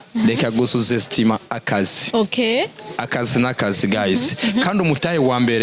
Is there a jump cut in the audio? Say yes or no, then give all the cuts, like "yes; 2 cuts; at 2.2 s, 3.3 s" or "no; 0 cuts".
no; 0 cuts